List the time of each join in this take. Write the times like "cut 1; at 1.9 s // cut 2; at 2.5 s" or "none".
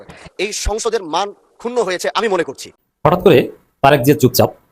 cut 1; at 2.8 s